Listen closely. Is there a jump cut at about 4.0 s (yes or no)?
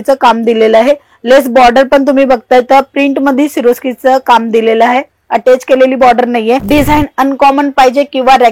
no